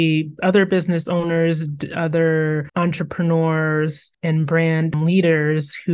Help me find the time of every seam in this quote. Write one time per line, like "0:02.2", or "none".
0:05.0